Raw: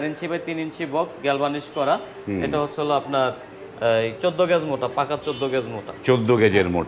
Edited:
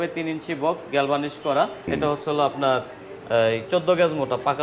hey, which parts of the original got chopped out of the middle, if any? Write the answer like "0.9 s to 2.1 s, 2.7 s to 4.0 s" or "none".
2.2 s to 2.4 s